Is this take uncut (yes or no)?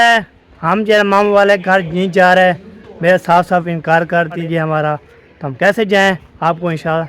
no